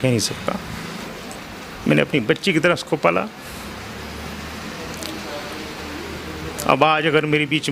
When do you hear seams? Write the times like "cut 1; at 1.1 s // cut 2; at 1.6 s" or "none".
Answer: cut 1; at 1.0 s